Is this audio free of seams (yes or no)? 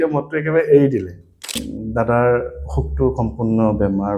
no